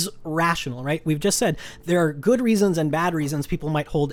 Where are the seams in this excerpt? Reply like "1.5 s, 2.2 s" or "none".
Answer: none